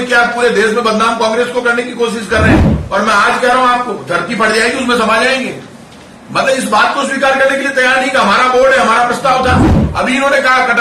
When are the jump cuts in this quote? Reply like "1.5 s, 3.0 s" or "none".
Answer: 2.7 s, 9.8 s